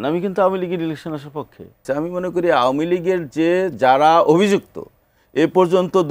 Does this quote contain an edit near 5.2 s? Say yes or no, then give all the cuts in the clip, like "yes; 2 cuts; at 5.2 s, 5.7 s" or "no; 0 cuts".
no; 1 cut; at 1.8 s